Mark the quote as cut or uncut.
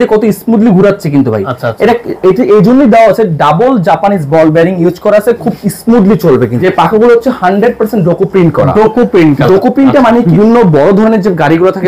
cut